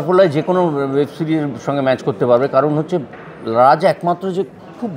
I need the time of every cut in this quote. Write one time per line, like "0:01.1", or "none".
none